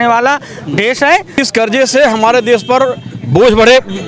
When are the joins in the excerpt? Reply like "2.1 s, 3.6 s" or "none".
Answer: 1.3 s